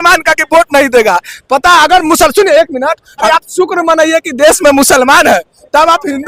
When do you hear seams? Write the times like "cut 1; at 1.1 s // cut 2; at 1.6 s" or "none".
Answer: cut 1; at 3.2 s